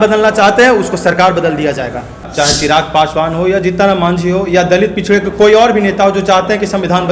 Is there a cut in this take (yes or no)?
yes